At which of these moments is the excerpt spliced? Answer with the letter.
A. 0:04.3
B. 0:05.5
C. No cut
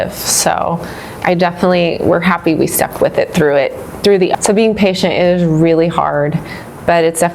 A